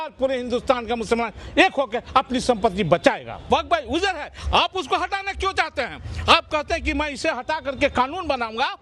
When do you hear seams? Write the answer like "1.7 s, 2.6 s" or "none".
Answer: 3.5 s